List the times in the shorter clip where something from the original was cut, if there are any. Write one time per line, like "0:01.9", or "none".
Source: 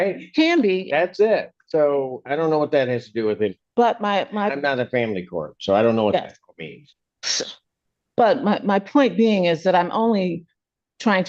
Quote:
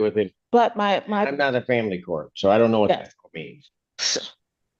none